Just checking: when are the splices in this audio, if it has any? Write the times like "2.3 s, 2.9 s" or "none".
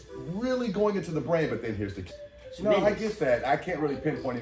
2.0 s